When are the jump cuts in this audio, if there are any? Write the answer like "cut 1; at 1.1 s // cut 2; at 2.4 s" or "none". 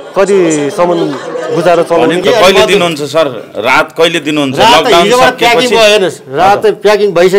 cut 1; at 2.2 s